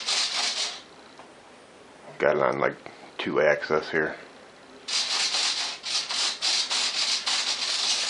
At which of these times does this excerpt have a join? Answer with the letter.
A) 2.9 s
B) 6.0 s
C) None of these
B